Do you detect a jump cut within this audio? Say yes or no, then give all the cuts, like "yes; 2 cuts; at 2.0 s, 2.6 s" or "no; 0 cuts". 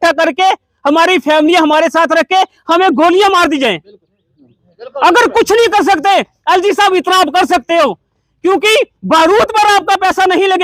no; 0 cuts